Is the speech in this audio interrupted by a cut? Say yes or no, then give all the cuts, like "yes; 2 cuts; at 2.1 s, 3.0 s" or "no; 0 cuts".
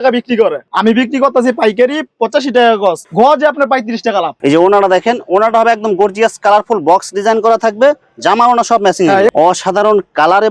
yes; 2 cuts; at 4.3 s, 9.3 s